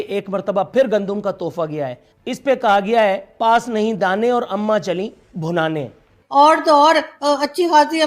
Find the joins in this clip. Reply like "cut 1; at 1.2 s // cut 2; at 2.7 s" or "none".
cut 1; at 2.1 s // cut 2; at 6.2 s